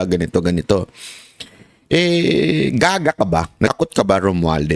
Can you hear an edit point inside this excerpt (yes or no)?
yes